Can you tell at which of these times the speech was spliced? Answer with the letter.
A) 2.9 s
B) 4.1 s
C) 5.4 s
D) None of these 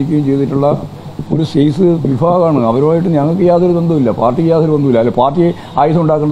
B